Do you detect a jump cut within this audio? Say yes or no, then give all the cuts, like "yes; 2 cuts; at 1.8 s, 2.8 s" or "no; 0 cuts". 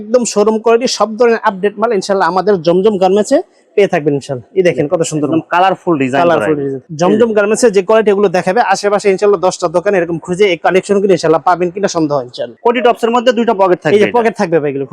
yes; 2 cuts; at 6.8 s, 12.4 s